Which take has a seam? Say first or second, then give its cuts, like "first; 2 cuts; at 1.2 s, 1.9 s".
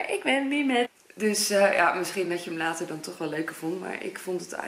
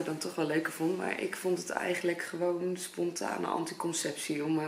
first; 1 cut; at 0.9 s